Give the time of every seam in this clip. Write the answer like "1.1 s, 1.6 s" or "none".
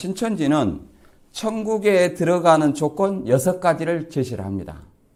none